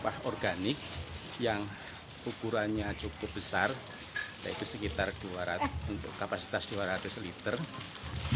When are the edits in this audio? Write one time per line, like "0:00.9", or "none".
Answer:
none